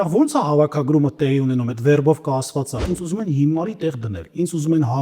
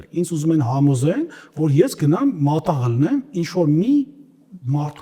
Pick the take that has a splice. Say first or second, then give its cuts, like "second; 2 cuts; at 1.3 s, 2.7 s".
first; 1 cut; at 2.8 s